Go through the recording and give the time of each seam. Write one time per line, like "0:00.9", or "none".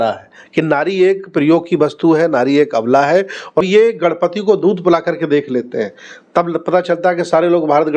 0:03.7